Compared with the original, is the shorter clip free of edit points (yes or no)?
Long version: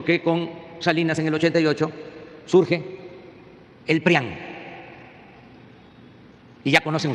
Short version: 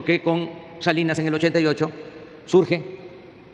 yes